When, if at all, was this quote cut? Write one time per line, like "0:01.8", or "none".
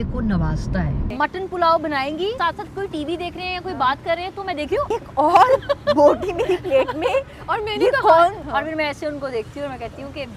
0:01.0
0:02.4
0:04.9
0:08.4